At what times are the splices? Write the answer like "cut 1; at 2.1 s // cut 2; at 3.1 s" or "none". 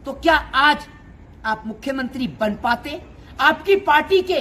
none